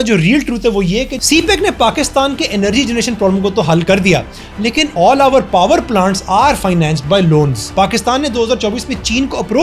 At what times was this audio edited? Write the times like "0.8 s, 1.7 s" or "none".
1.2 s, 4.8 s, 7.7 s